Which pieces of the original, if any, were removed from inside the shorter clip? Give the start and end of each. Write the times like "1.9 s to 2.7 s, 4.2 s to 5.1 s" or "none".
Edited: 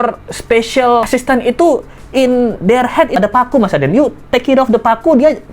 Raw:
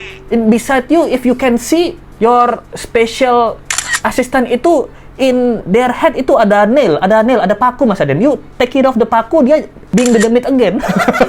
3.5 s to 4.1 s, 6.2 s to 7.4 s

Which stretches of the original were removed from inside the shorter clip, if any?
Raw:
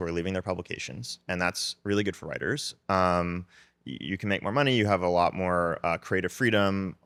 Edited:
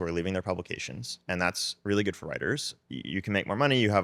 2.7 s to 3.7 s

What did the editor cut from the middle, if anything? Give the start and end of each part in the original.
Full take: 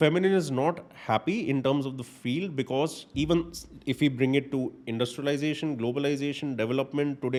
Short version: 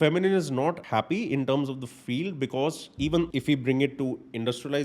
0.8 s to 1.0 s, 3.5 s to 3.8 s

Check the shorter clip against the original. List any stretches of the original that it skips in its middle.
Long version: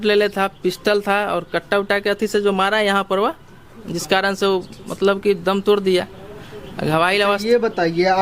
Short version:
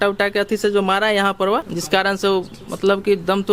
3.4 s to 3.9 s

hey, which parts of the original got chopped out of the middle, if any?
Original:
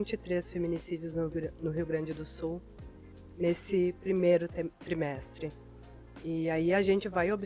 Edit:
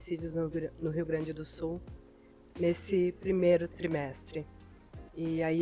4.5 s to 4.8 s

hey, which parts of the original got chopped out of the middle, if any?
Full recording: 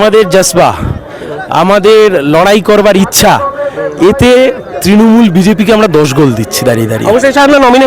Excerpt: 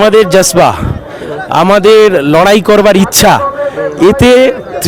none

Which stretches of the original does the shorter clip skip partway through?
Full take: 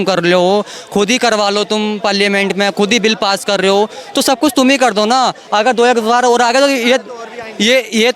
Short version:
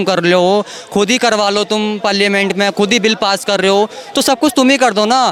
none

